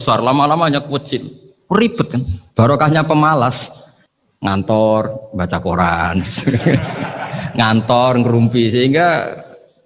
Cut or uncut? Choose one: uncut